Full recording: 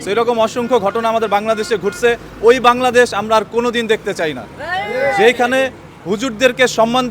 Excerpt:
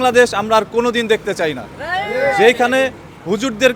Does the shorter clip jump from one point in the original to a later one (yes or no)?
no